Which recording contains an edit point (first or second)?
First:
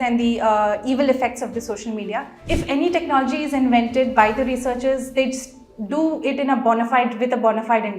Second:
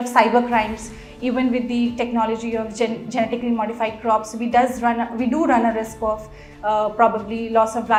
first